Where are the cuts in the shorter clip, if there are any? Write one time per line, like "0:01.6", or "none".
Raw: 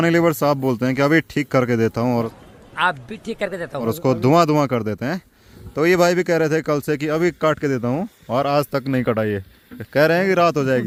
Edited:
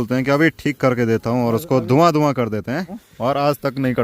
0:01.6
0:03.0